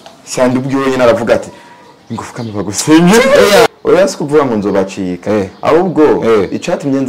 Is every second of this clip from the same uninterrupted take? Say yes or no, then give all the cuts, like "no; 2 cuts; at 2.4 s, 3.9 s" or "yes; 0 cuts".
no; 1 cut; at 3.7 s